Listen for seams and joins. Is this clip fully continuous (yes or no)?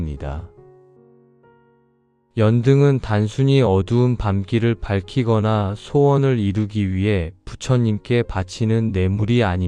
yes